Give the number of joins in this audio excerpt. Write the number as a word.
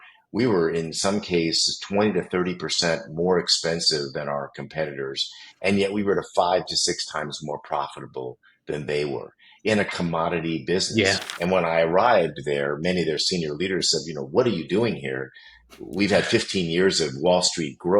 one